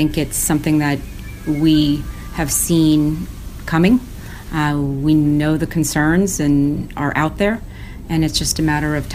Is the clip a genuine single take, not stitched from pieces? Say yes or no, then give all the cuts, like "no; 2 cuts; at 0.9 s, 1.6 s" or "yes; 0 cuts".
yes; 0 cuts